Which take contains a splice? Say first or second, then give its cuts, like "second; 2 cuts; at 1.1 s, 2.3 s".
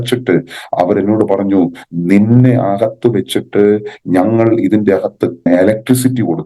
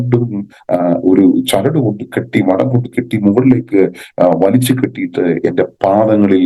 first; 1 cut; at 5.5 s